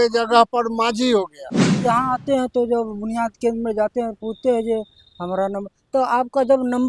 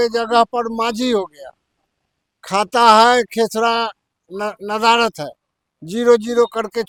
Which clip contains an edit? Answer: first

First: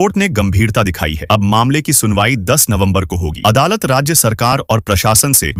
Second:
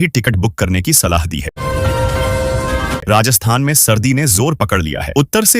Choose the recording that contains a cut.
second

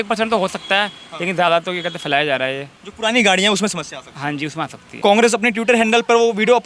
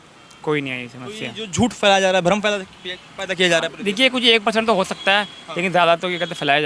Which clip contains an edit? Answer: first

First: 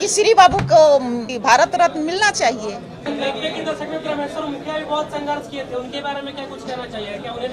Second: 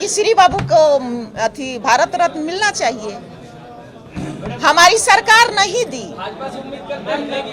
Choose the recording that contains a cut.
first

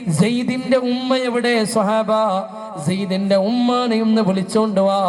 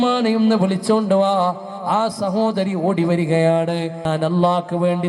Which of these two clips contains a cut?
second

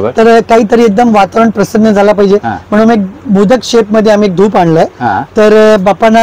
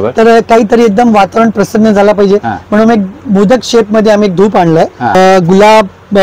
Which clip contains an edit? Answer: second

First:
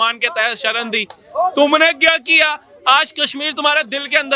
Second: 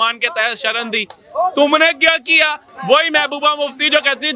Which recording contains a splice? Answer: second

